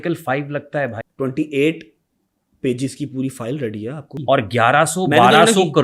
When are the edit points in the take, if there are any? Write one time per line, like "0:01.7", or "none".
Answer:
0:01.0
0:04.2